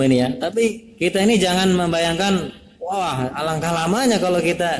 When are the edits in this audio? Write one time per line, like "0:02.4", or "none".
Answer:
0:00.9
0:03.3